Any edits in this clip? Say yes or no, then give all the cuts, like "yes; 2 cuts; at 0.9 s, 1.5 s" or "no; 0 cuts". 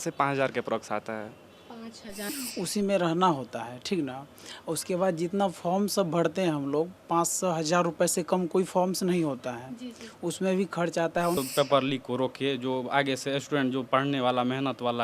yes; 2 cuts; at 2.3 s, 11.4 s